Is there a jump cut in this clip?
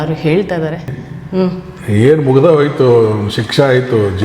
yes; 1 cut; at 0.9 s

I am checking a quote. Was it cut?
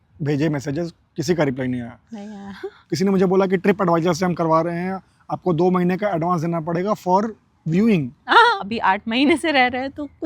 yes; 2 cuts; at 2.7 s, 8.6 s

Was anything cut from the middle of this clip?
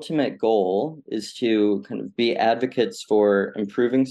no; 0 cuts

